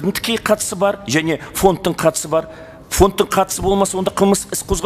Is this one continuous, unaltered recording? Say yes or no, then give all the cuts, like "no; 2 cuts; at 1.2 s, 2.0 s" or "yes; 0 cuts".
yes; 0 cuts